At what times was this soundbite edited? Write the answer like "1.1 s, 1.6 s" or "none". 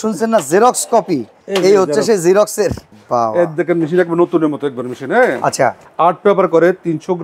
2.9 s, 5.8 s